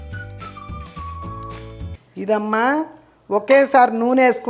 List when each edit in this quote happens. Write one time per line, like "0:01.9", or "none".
0:02.0